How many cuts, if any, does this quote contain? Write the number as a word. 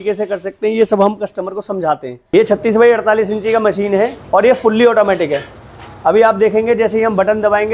one